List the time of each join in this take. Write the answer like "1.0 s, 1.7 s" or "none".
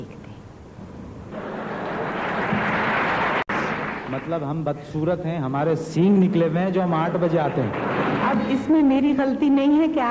8.3 s